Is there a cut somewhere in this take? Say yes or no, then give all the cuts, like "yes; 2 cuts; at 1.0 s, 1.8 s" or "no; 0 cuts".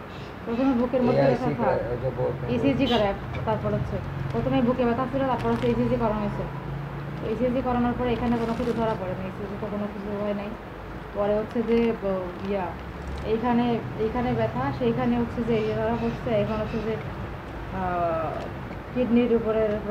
no; 0 cuts